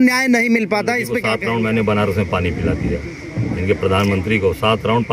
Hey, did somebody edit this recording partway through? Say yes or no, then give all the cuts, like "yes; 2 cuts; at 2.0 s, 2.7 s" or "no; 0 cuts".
yes; 1 cut; at 1.3 s